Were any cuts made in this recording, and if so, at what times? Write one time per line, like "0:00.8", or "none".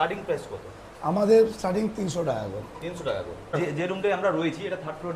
0:03.6